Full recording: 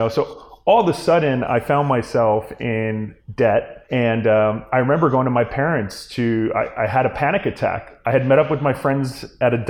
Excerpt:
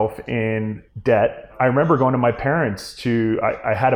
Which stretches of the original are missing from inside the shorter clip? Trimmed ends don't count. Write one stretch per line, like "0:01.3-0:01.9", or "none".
0:03.8-0:04.6

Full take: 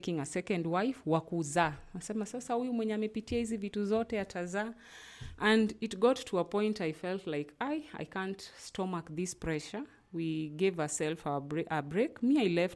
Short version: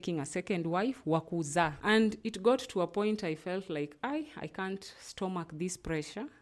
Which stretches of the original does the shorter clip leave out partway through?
0:01.8-0:05.3

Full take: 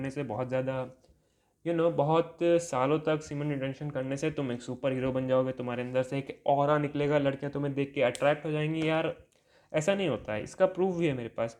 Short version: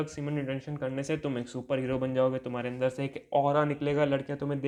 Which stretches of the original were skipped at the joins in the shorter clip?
none

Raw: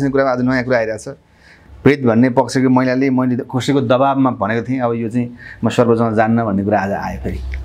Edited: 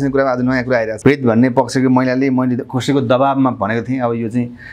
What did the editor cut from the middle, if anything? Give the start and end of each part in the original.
0:00.9-0:01.7

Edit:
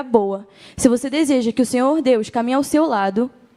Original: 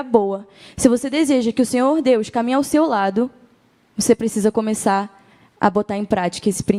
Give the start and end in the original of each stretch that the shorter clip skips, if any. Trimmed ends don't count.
none

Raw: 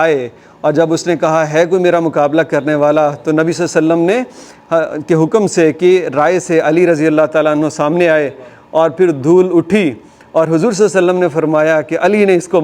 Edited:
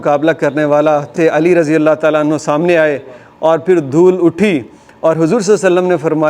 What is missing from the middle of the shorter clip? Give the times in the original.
0:03.2-0:06.4

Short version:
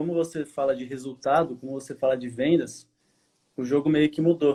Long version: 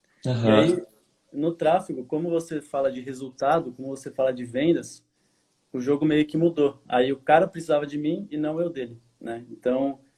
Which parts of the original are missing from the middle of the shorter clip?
none

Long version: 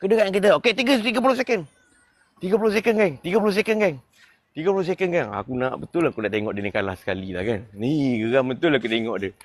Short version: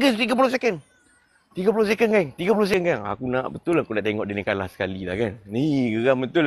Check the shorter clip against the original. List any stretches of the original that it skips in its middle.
0:03.6-0:05.0

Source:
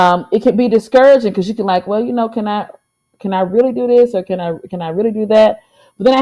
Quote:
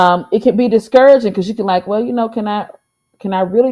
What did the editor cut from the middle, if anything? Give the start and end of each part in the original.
none

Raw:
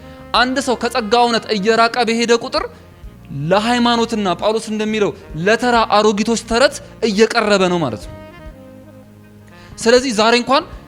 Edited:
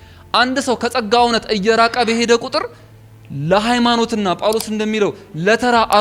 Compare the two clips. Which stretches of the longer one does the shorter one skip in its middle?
none

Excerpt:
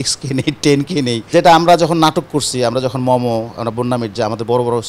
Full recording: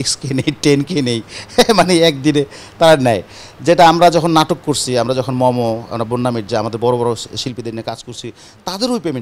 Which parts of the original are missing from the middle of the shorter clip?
0:01.2-0:03.5

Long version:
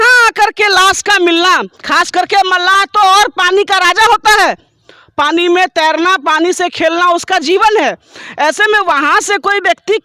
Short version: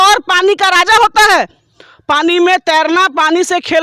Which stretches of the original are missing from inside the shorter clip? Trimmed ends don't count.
none

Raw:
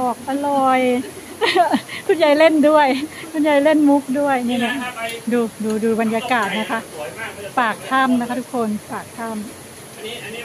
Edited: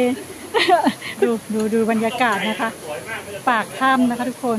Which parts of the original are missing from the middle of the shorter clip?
0:02.1-0:05.4

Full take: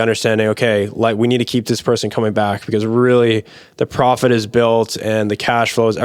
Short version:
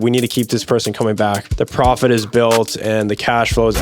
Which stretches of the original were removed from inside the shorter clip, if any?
0:02.6-0:03.6

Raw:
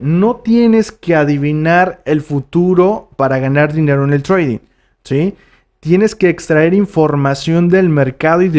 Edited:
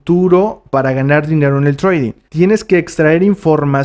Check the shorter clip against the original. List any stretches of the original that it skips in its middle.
0:04.7-0:05.7

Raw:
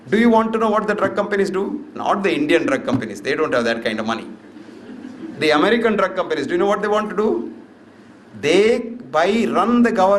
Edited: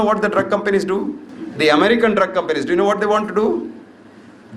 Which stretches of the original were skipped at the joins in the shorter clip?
0:01.9-0:05.1

